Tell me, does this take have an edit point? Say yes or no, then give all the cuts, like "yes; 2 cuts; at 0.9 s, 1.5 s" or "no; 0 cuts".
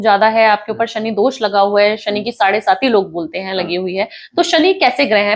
no; 0 cuts